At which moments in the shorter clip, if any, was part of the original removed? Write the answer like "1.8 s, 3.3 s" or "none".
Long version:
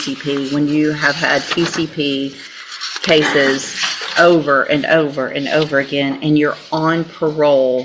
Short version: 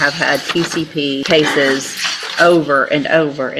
1.2 s